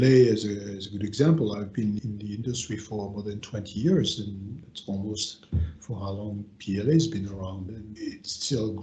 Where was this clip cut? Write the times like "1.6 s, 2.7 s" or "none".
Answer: 2.0 s